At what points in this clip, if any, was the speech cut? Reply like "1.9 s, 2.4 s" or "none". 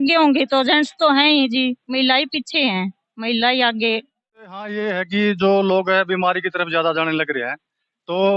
4.7 s